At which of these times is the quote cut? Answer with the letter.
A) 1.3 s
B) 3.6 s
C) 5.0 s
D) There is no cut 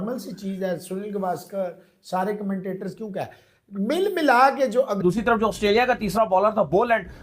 C